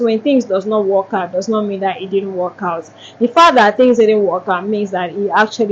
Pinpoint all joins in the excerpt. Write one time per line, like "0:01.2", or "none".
none

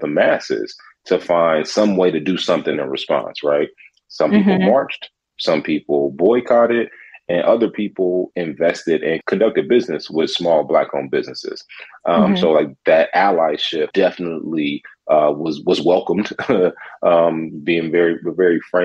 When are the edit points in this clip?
0:09.2
0:13.9

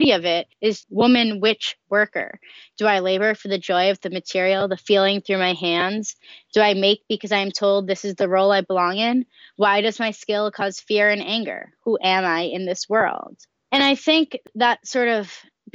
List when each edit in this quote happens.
0:13.4

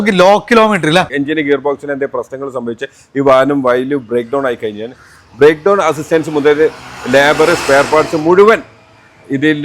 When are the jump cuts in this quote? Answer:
0:01.2

